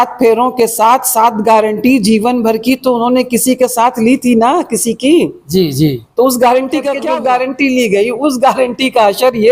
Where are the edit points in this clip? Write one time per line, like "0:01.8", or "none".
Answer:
0:06.9

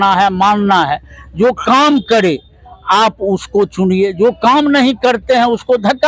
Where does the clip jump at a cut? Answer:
none

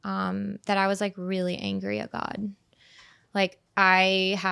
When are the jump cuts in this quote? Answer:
none

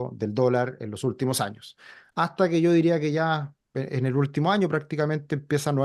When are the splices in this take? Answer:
none

